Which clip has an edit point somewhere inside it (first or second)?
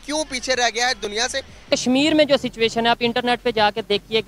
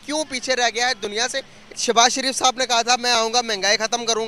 first